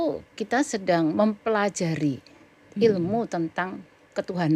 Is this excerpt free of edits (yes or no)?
yes